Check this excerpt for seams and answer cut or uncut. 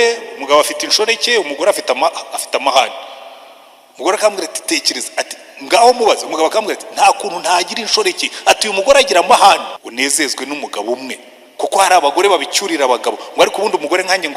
cut